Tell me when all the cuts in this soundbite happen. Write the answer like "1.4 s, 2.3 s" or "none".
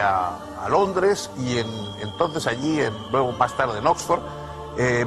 1.3 s